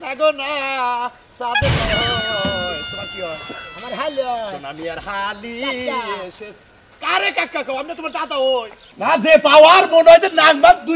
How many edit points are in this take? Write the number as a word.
one